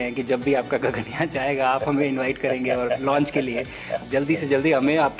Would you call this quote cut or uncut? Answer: cut